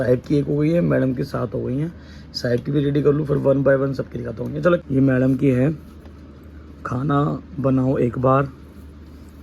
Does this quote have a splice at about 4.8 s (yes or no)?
yes